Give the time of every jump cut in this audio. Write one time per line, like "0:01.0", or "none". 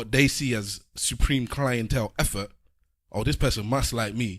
none